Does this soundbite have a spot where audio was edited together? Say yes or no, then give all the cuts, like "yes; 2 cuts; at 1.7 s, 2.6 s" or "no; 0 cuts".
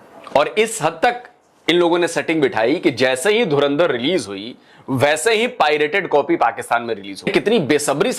yes; 1 cut; at 7.3 s